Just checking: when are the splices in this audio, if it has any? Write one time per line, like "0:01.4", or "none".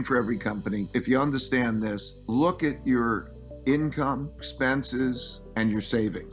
0:00.9
0:02.1
0:04.5
0:05.3